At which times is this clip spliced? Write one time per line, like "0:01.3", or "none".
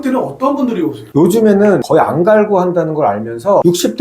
0:01.1